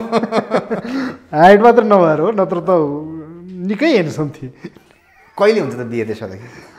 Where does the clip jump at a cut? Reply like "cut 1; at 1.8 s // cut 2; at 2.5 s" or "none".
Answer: none